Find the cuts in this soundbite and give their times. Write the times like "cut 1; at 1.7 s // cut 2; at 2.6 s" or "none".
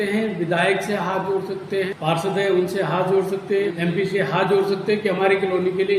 cut 1; at 1.9 s // cut 2; at 3.7 s